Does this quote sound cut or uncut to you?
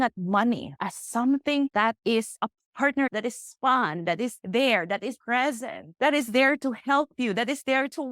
uncut